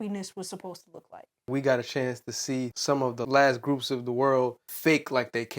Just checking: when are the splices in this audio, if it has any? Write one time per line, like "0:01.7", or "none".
0:01.5
0:03.1
0:04.7